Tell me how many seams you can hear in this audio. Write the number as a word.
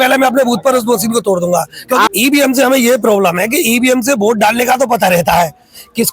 one